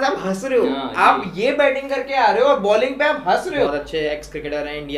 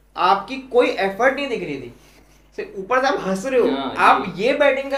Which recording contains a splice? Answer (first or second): first